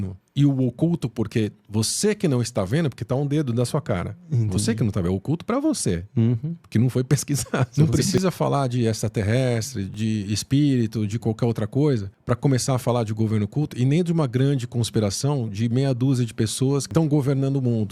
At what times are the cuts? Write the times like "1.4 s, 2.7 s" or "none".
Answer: 7.7 s, 9.9 s, 12.1 s, 16.9 s